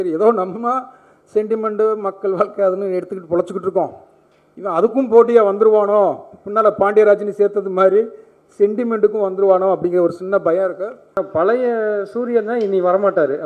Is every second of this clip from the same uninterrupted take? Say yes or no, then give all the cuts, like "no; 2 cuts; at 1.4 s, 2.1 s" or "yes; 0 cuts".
no; 1 cut; at 11.0 s